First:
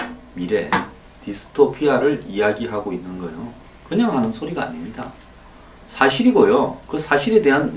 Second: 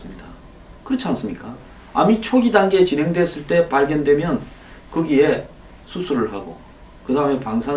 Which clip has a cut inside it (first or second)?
second